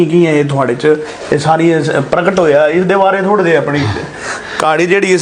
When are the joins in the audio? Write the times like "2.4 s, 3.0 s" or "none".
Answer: none